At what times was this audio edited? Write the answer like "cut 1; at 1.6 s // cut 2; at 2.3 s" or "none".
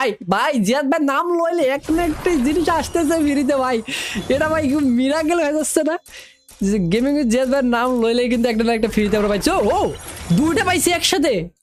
none